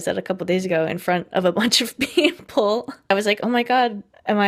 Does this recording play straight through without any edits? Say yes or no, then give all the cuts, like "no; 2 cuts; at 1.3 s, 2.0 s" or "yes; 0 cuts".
yes; 0 cuts